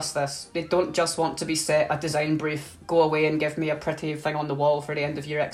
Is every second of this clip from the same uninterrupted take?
yes; 0 cuts

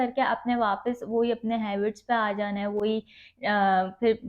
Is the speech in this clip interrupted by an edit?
no; 0 cuts

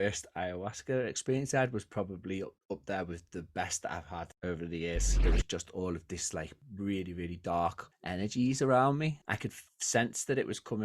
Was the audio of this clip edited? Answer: yes; 2 cuts; at 5.1 s, 9.2 s

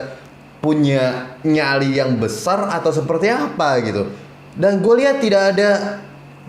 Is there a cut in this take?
no; 0 cuts

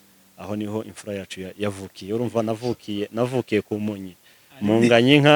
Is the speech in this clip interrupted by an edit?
no; 0 cuts

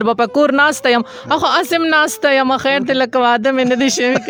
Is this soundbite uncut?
yes; 0 cuts

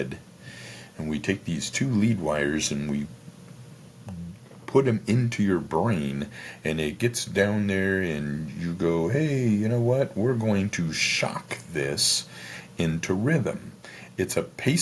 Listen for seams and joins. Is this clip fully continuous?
yes; 0 cuts

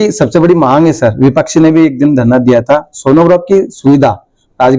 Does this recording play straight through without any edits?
yes; 0 cuts

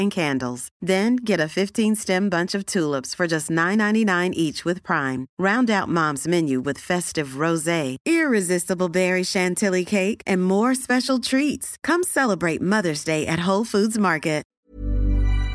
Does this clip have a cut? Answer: yes; 1 cut; at 14.6 s

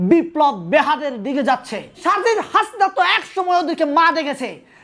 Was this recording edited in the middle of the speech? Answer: yes; 1 cut; at 2.0 s

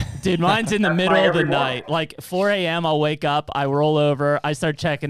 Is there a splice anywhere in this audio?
no; 0 cuts

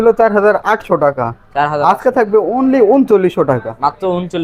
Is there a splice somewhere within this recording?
no; 0 cuts

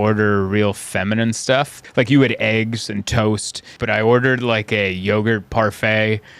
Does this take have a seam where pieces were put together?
yes; 2 cuts; at 1.8 s, 3.7 s

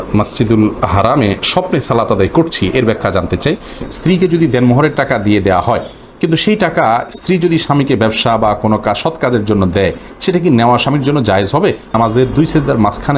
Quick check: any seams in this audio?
yes; 2 cuts; at 3.9 s, 11.9 s

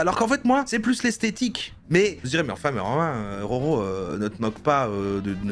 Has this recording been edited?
yes; 1 cut; at 1.8 s

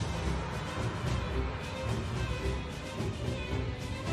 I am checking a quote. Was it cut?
no; 0 cuts

